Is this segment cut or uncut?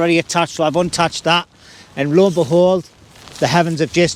uncut